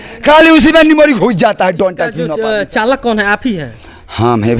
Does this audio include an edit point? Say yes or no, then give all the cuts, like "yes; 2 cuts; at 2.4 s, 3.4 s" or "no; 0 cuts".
yes; 1 cut; at 2.2 s